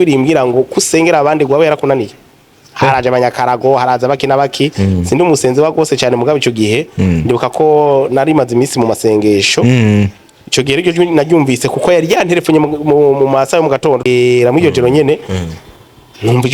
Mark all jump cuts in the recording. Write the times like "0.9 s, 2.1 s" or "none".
14.0 s